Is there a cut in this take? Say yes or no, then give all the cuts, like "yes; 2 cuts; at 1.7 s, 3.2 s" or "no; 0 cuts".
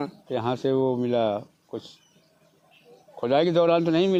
no; 0 cuts